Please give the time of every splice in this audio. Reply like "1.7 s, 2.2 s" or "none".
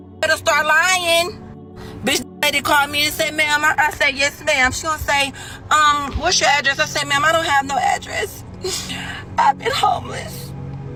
none